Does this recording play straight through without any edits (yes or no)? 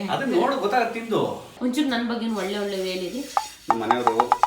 no